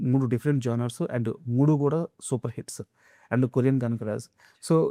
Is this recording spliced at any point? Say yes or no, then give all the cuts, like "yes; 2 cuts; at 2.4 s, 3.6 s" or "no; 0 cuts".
no; 0 cuts